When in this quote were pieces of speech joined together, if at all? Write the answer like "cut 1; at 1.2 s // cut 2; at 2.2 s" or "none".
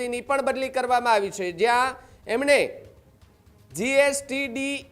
none